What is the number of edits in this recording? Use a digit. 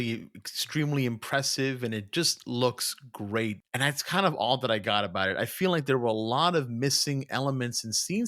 1